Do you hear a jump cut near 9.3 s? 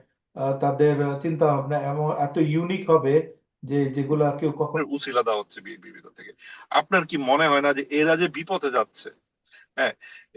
no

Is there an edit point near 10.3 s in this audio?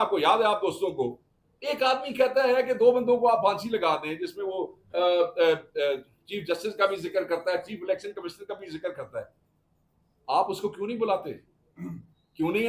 no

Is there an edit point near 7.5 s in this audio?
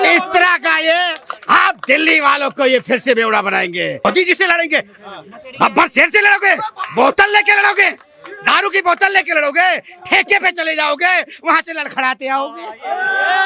no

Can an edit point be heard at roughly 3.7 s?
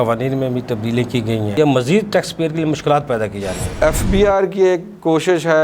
yes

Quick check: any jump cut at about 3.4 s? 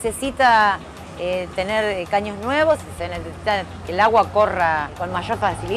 no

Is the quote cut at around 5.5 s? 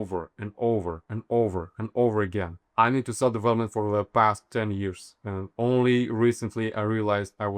no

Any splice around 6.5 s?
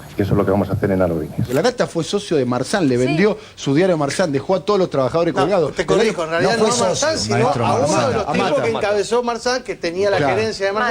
no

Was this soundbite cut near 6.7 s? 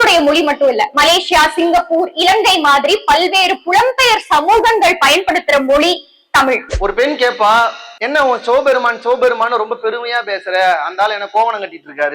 yes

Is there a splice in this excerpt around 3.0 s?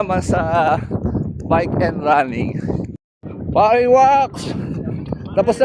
yes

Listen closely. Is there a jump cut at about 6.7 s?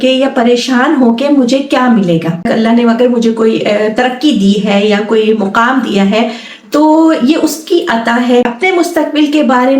no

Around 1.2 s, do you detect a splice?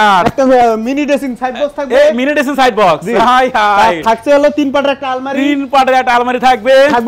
no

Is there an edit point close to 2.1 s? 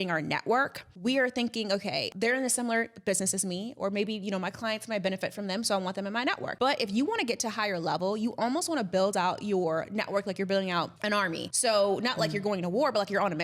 yes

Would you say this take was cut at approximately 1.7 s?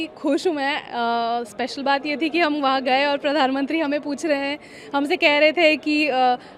no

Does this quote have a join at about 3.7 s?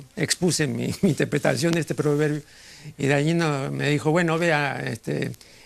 no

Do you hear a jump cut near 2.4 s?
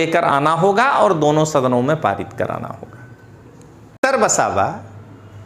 no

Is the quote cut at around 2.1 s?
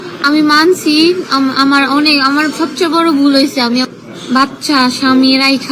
no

